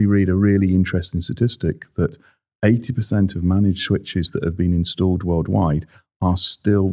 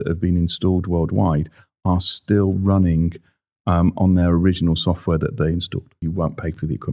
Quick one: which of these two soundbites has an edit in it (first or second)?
second